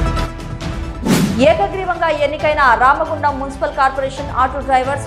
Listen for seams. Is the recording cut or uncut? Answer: cut